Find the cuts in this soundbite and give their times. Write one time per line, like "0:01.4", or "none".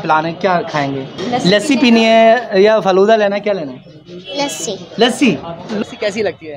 0:01.1
0:05.8